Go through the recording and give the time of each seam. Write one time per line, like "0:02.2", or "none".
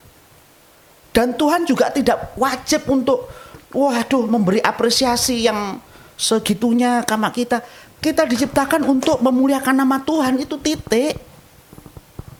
none